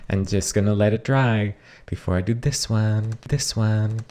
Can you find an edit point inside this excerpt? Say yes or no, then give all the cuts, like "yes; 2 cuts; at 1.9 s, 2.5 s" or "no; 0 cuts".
no; 0 cuts